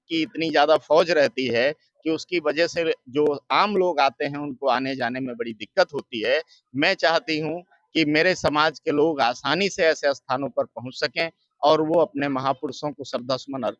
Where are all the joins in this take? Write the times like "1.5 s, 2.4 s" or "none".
none